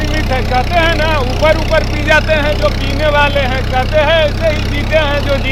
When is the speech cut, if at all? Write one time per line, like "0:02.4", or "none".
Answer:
none